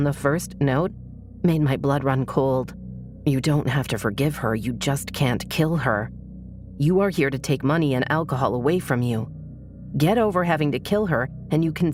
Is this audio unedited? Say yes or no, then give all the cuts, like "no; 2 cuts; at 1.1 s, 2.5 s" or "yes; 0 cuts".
yes; 0 cuts